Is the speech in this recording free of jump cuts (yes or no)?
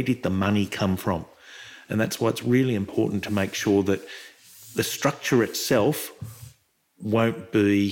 yes